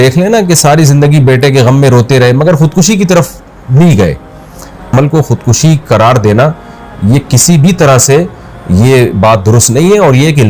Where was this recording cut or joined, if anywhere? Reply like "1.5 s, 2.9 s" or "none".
4.9 s